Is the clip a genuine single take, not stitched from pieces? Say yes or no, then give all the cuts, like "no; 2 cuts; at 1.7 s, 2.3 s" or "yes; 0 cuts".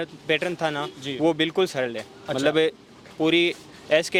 yes; 0 cuts